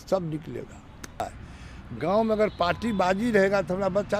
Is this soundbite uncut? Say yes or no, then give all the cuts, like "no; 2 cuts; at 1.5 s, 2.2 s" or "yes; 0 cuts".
no; 1 cut; at 1.2 s